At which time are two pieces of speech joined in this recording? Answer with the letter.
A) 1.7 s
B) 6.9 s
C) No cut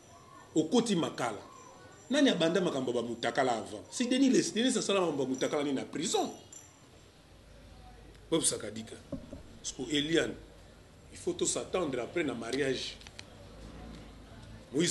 B